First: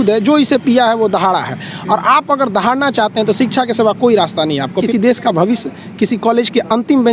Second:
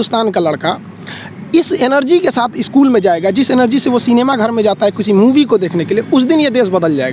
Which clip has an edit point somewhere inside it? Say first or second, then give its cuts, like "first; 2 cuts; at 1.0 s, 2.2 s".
first; 1 cut; at 4.8 s